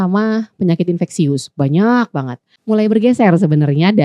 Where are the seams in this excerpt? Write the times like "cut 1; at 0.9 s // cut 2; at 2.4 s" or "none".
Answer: cut 1; at 2.5 s